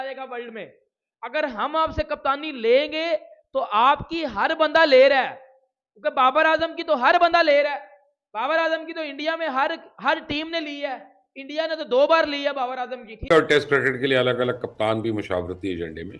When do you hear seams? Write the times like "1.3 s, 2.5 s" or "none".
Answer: 13.3 s